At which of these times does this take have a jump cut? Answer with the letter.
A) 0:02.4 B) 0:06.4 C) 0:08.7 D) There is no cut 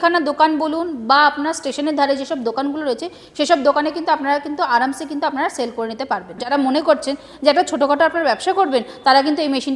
B